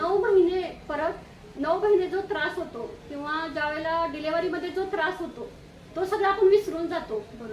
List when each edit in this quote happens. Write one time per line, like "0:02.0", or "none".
none